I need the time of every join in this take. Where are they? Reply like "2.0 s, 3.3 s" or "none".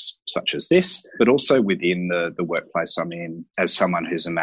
none